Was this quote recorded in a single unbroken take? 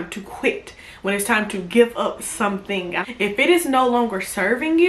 no; 1 cut; at 2.9 s

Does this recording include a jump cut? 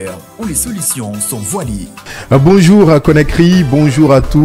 no; 0 cuts

